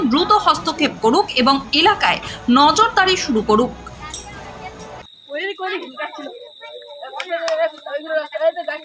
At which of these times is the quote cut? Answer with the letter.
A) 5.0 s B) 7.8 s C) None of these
A